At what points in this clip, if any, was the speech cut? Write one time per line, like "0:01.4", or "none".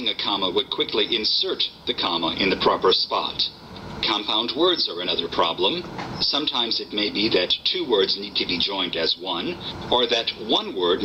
0:07.6